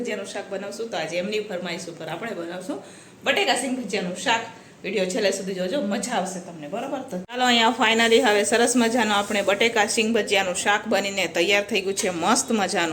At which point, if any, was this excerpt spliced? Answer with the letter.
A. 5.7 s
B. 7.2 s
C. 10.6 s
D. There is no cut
B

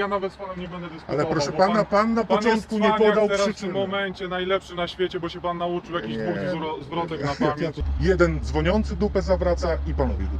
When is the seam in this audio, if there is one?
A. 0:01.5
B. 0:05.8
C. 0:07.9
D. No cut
C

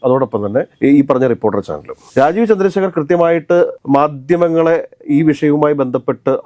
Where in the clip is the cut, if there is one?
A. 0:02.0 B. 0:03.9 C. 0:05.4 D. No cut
A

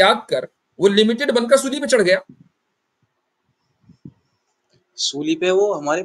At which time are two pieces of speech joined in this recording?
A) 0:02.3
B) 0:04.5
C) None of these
C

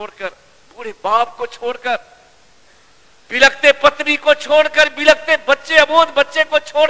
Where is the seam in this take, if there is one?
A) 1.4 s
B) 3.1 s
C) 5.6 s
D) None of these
D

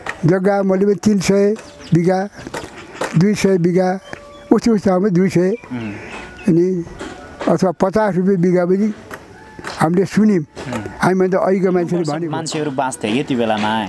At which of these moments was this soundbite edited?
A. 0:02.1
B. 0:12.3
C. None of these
B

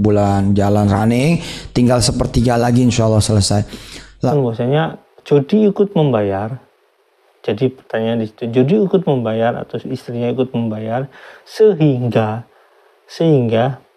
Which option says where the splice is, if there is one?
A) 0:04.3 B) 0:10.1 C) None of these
A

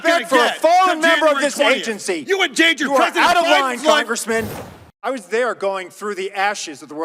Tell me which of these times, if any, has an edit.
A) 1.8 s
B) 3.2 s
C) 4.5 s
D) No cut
C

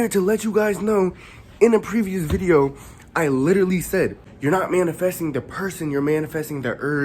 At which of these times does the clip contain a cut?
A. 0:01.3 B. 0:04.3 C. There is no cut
B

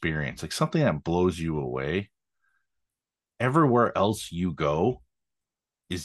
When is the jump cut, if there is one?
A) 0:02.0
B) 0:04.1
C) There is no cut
C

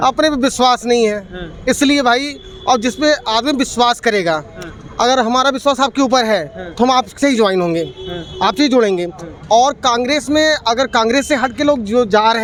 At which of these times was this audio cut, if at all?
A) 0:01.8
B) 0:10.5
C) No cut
C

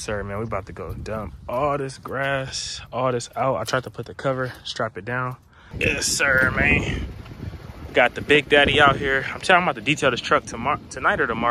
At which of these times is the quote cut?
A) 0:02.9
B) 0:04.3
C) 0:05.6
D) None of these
C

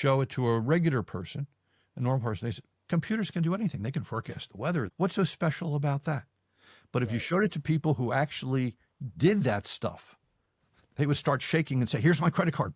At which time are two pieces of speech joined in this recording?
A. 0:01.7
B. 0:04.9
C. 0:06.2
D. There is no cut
B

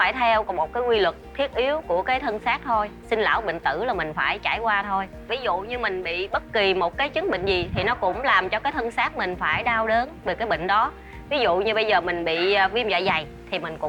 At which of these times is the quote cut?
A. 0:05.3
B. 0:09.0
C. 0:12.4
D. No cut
A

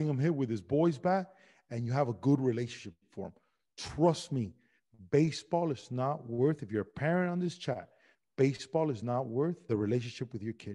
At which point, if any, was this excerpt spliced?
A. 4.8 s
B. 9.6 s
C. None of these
B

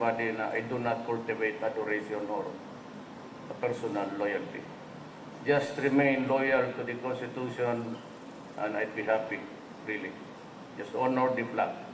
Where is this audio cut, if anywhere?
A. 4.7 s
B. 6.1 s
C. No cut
A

